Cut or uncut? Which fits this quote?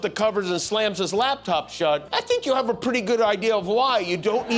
cut